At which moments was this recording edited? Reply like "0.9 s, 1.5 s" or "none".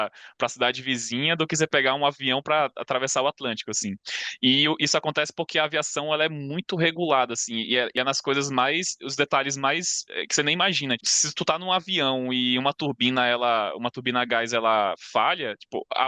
8.0 s, 11.1 s